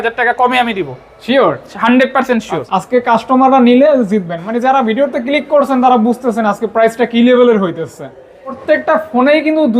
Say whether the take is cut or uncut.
cut